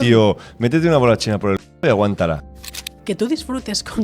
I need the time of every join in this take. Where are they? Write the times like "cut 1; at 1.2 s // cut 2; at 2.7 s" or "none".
cut 1; at 2.5 s